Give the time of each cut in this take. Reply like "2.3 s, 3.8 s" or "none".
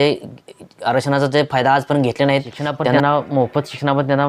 3.0 s